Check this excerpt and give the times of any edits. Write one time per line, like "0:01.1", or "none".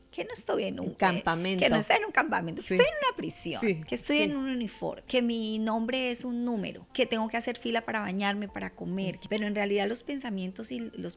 0:05.0
0:06.8
0:09.2